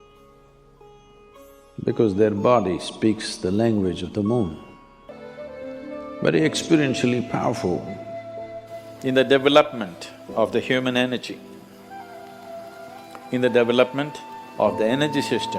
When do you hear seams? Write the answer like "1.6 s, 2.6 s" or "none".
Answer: 5.1 s